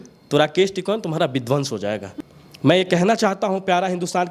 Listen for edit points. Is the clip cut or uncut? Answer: cut